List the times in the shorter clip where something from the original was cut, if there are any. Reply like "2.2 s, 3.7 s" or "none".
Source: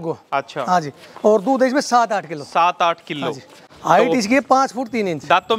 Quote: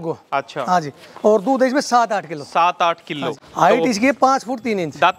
3.4 s